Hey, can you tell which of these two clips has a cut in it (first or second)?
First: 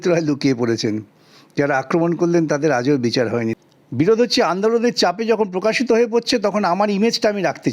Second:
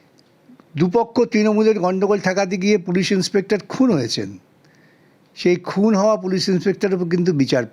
first